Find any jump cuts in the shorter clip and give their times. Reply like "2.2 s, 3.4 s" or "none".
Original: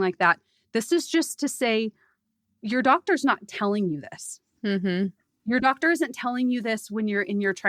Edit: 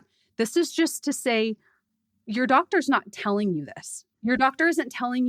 4.0 s